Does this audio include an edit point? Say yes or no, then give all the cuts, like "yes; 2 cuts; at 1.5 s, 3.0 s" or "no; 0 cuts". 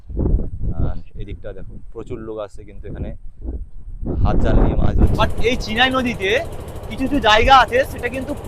yes; 1 cut; at 5.1 s